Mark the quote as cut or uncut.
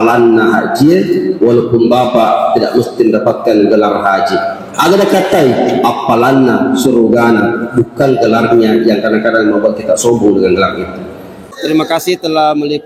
cut